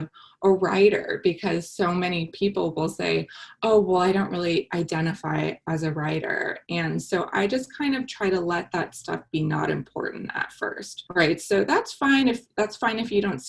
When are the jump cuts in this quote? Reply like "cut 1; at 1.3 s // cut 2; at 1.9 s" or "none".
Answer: cut 1; at 10.9 s

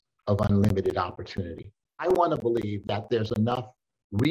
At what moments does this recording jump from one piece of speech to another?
cut 1; at 2.0 s

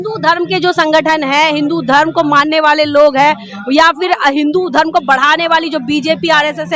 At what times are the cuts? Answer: none

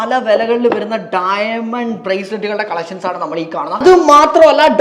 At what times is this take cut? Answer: cut 1; at 3.8 s

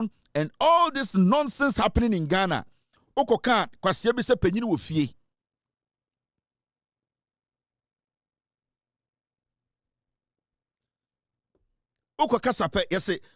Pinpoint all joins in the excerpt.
none

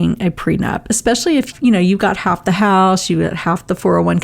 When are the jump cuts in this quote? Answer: cut 1; at 1.5 s

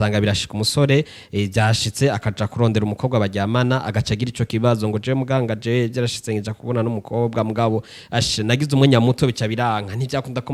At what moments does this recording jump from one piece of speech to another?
none

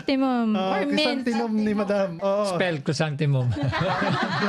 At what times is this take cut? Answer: cut 1; at 2.2 s

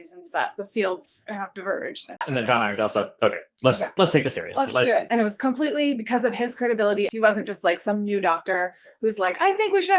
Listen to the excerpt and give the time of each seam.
cut 1; at 2.2 s // cut 2; at 5.1 s // cut 3; at 7.1 s

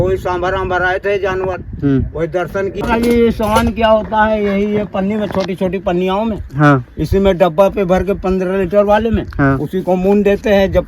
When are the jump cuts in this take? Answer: cut 1; at 2.8 s

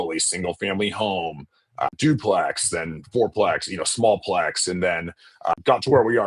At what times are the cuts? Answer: cut 1; at 1.9 s // cut 2; at 5.5 s

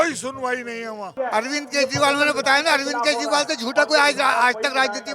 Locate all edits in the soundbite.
cut 1; at 1.1 s

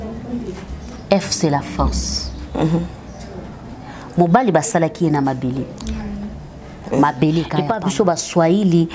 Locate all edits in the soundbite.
cut 1; at 7.6 s

